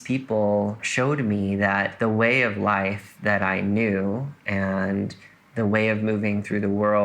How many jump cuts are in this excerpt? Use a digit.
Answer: 2